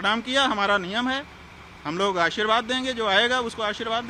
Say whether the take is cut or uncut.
uncut